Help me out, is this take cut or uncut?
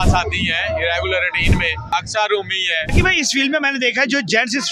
cut